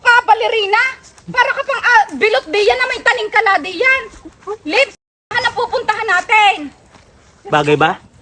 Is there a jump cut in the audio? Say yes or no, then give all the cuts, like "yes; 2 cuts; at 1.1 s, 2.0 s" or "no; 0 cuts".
no; 0 cuts